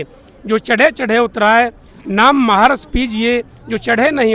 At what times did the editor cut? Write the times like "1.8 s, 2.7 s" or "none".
none